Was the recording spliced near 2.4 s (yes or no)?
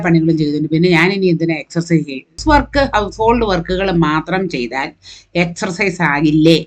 yes